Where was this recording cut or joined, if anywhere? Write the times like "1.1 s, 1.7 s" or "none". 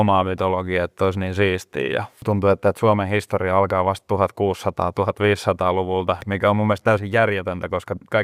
2.2 s